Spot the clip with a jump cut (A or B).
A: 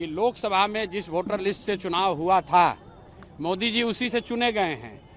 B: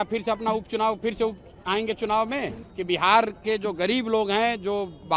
B